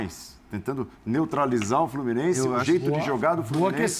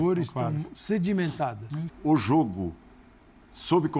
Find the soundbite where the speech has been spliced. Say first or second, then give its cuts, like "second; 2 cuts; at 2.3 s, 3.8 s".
second; 1 cut; at 1.9 s